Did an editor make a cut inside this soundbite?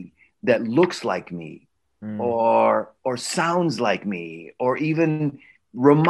no; 0 cuts

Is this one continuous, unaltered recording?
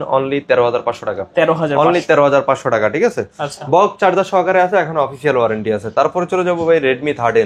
yes; 0 cuts

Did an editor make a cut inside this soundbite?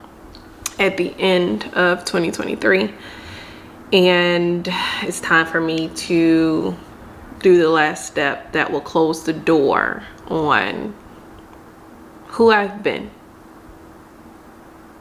no; 0 cuts

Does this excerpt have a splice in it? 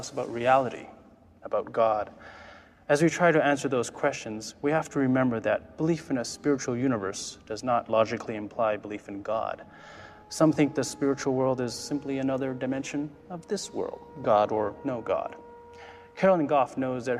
no; 0 cuts

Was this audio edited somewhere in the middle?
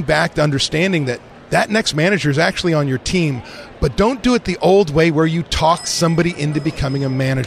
no; 0 cuts

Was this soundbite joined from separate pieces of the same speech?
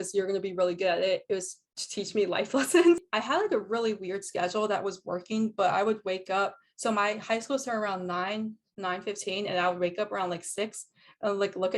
yes; 1 cut; at 3.1 s

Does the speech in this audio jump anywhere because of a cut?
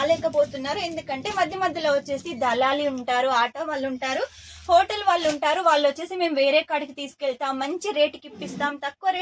no; 0 cuts

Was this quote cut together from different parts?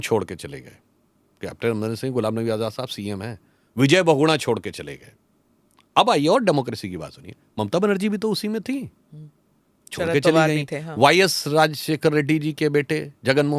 no; 0 cuts

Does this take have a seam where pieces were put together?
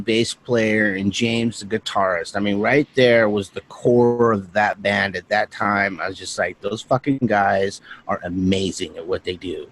yes; 1 cut; at 7.2 s

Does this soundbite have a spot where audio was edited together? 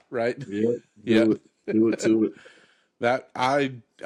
no; 0 cuts

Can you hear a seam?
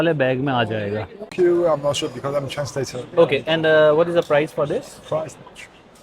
yes; 1 cut; at 1.3 s

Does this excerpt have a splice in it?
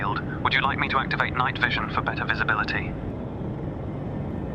no; 0 cuts

